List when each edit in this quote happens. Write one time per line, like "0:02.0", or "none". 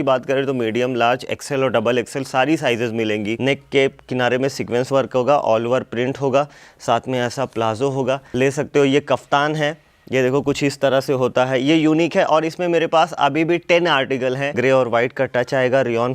0:03.4
0:08.3
0:14.6